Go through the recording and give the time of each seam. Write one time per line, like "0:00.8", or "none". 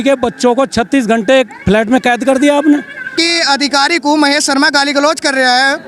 0:03.1